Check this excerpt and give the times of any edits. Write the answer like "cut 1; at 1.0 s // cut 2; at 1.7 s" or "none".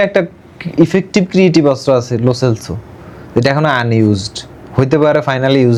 none